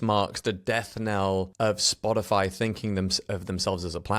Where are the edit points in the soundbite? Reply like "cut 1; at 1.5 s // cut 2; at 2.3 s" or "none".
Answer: cut 1; at 1.5 s